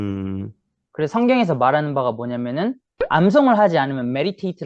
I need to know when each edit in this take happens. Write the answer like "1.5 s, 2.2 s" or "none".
2.9 s